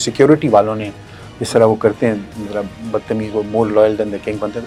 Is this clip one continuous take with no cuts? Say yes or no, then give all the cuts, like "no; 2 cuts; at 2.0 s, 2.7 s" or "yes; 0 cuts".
yes; 0 cuts